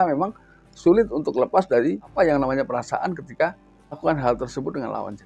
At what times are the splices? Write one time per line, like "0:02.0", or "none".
0:02.1
0:03.9